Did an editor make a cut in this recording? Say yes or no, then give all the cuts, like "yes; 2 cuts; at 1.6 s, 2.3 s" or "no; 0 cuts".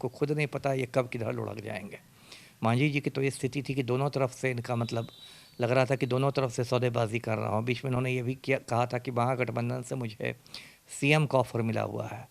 no; 0 cuts